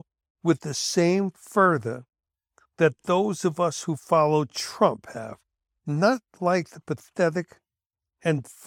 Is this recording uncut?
yes; 0 cuts

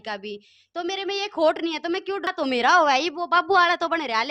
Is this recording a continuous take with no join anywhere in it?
no; 1 cut; at 2.3 s

